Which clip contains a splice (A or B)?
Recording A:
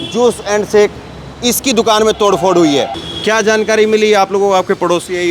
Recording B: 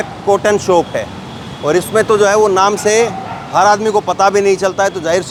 A